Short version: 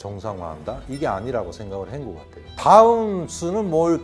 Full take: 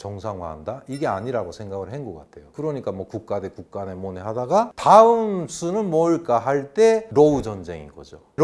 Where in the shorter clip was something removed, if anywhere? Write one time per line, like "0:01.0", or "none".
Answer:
0:02.5